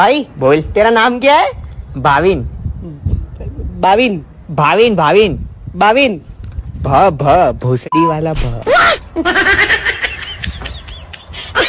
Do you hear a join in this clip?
no; 0 cuts

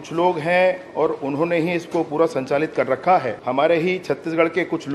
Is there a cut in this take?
yes; 1 cut; at 3.4 s

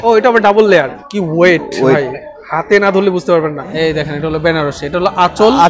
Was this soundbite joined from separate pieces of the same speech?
yes; 2 cuts; at 1.0 s, 3.7 s

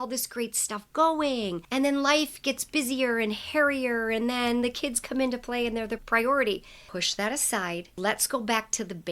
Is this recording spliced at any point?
yes; 3 cuts; at 1.6 s, 6.8 s, 8.0 s

